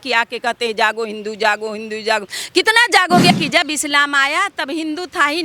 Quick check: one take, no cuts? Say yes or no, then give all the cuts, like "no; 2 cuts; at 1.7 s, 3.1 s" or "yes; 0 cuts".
no; 1 cut; at 3.3 s